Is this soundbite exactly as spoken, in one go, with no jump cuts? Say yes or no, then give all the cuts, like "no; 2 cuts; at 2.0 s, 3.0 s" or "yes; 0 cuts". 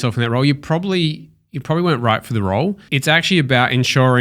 no; 1 cut; at 2.9 s